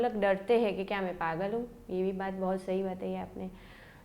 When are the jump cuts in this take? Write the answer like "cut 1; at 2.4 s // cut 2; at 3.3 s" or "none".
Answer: none